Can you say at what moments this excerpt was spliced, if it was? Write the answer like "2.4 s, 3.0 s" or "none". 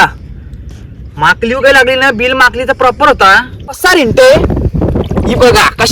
3.8 s